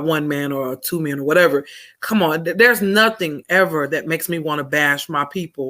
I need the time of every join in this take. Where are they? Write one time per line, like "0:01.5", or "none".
none